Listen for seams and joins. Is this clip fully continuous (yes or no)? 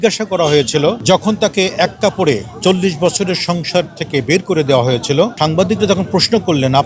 no